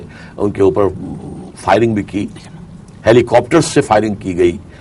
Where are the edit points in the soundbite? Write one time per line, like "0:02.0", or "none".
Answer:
none